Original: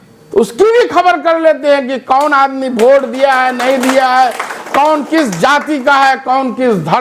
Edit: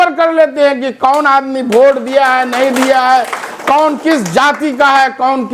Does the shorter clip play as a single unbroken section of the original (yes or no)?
yes